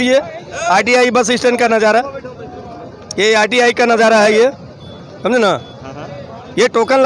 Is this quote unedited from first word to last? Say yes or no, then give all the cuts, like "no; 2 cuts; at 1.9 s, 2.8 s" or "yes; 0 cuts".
yes; 0 cuts